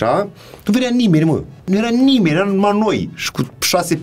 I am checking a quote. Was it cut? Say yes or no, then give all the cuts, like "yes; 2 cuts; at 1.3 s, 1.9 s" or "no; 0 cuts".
yes; 1 cut; at 1.7 s